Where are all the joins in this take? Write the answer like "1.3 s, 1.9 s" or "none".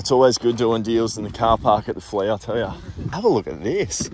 3.1 s